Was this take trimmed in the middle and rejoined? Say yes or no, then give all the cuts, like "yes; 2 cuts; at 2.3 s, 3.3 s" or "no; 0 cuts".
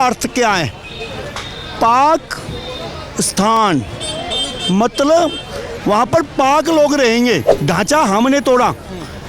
yes; 1 cut; at 7.5 s